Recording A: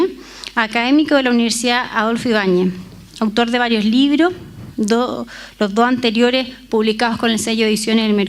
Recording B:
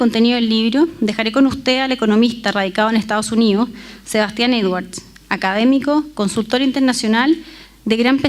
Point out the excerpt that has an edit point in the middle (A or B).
B